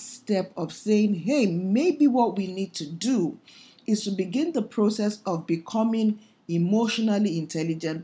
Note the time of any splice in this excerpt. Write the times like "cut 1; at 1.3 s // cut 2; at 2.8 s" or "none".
none